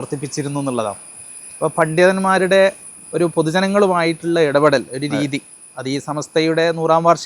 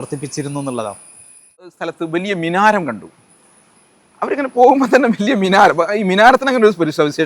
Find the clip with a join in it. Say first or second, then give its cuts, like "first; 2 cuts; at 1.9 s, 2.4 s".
second; 1 cut; at 1.7 s